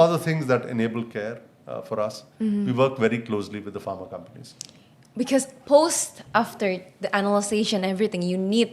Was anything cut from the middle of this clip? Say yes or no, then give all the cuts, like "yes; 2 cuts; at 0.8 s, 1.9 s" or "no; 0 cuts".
no; 0 cuts